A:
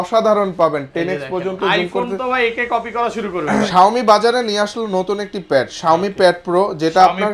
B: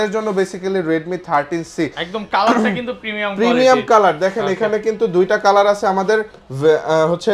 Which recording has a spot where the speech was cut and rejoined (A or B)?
A